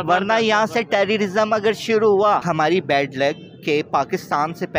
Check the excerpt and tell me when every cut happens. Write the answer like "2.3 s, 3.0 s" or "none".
2.4 s